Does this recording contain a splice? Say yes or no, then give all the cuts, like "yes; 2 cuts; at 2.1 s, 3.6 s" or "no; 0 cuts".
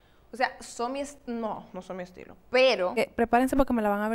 yes; 1 cut; at 2.9 s